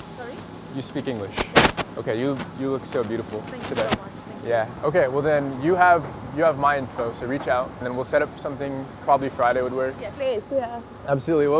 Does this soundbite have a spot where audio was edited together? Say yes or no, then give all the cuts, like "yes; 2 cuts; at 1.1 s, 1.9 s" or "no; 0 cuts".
yes; 3 cuts; at 4.7 s, 7.8 s, 10.1 s